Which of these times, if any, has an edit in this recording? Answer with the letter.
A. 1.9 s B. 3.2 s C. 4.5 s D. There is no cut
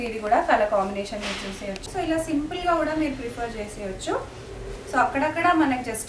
A